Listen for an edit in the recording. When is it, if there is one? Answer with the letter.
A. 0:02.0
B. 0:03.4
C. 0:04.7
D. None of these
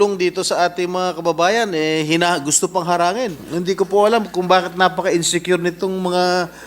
B